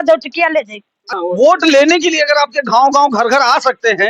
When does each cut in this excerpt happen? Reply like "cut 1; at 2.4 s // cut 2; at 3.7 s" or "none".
cut 1; at 1.1 s